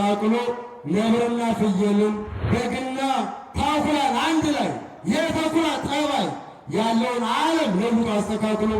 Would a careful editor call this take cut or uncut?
cut